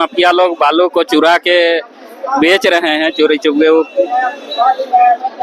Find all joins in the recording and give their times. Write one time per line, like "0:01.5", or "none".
none